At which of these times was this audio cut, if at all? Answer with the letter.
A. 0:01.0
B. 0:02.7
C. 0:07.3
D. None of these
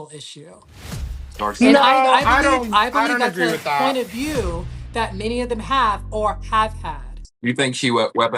C